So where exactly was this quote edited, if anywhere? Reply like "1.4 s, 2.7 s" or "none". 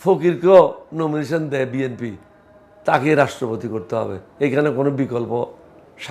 none

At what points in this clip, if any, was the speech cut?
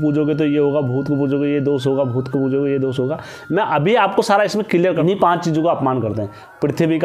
5.0 s

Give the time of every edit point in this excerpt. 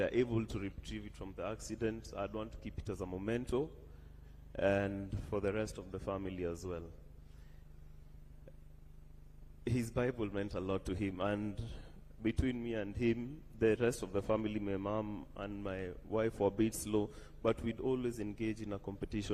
none

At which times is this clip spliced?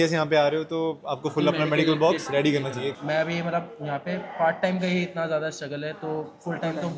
2.9 s

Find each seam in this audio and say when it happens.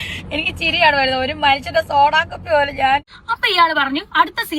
3.1 s

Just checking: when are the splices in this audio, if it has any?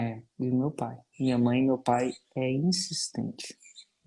1.1 s

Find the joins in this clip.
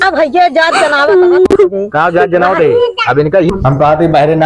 3.5 s

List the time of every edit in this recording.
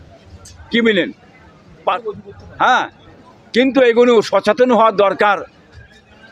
2.0 s

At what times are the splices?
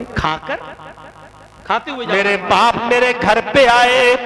2.0 s

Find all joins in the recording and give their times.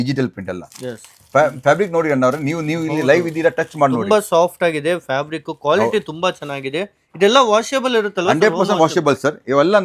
none

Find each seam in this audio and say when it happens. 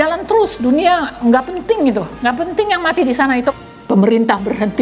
3.5 s

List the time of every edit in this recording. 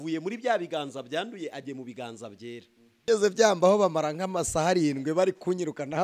2.8 s

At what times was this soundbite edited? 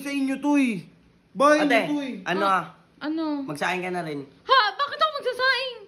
none

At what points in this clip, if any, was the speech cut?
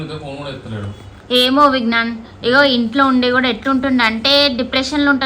1.1 s

